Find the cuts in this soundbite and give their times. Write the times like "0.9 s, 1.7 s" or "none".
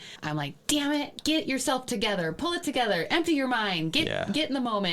1.1 s